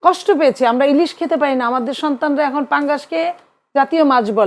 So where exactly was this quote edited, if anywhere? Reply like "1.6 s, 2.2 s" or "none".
none